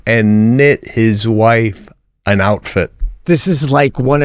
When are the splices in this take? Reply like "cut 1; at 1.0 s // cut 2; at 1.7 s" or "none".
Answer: cut 1; at 3.2 s